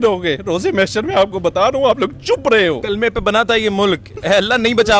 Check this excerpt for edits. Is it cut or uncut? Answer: cut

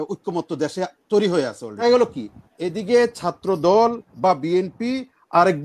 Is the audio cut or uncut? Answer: cut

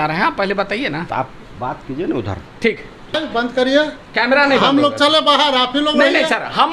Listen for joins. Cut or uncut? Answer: cut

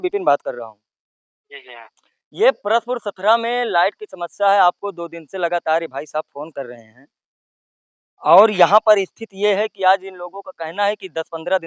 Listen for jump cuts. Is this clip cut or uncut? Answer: uncut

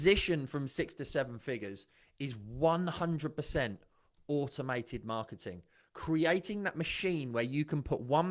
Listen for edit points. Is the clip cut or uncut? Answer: uncut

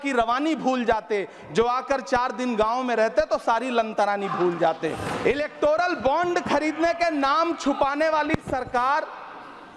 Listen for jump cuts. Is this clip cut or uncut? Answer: cut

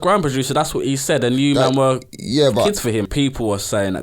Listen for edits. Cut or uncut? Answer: cut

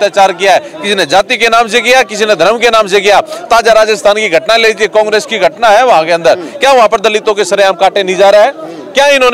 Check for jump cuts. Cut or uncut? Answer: uncut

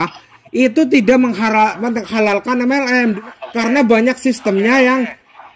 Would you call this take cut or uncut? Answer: cut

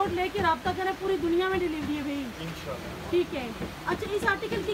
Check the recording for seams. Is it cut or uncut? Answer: uncut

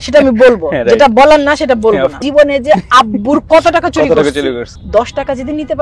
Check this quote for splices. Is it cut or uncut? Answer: cut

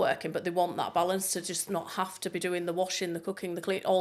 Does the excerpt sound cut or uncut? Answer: uncut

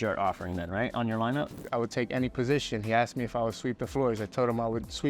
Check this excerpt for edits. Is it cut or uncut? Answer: cut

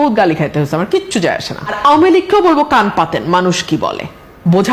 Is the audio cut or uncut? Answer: cut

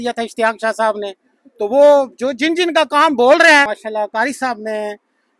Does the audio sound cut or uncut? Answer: cut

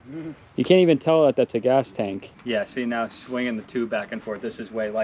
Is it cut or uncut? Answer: cut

